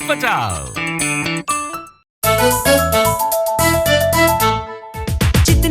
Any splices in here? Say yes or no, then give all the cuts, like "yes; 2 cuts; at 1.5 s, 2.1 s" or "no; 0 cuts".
yes; 1 cut; at 2.1 s